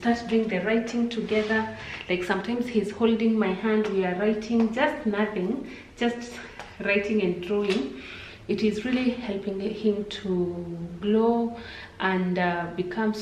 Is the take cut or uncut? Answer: uncut